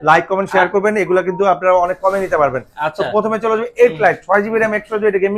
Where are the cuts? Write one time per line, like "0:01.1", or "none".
none